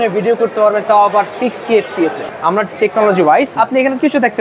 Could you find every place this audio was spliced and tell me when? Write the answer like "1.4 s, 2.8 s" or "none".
2.2 s, 3.5 s